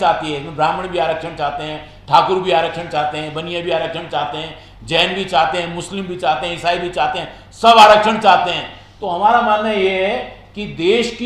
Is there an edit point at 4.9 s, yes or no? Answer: no